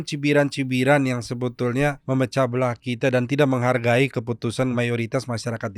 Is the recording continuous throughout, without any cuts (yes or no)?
no